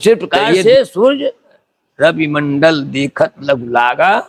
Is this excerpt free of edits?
yes; 0 cuts

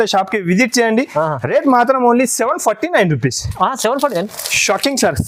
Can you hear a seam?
no; 0 cuts

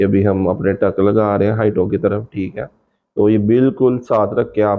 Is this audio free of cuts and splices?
yes; 0 cuts

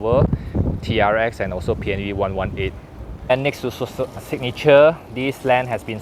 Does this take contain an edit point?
yes; 1 cut; at 3.3 s

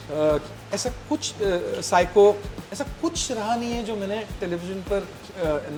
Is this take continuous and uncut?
yes; 0 cuts

